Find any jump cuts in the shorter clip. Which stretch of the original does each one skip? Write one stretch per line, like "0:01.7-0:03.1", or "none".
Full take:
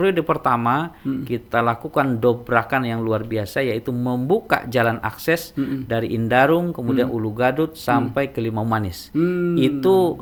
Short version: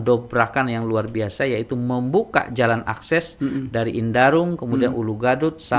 none